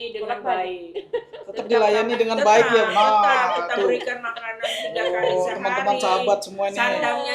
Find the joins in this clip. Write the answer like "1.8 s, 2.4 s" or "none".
none